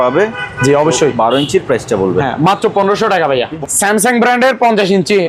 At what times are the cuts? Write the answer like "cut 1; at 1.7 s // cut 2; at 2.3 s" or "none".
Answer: cut 1; at 3.6 s